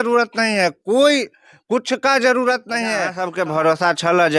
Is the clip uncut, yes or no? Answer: no